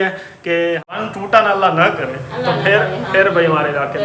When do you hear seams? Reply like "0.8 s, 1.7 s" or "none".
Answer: 0.9 s